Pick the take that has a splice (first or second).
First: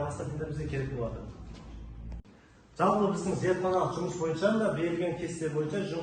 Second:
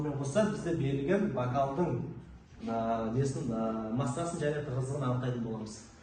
first